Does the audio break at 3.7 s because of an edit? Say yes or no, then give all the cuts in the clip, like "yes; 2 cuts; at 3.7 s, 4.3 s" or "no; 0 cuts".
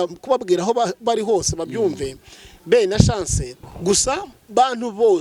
yes; 1 cut; at 3.7 s